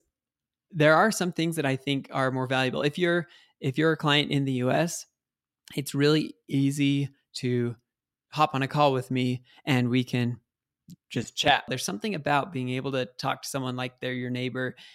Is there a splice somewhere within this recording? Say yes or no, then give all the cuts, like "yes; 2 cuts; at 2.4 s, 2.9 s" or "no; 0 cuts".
yes; 1 cut; at 11.8 s